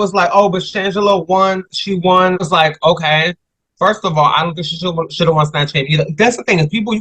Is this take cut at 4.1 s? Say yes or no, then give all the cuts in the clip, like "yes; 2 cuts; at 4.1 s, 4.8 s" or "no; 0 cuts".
no; 1 cut; at 2.4 s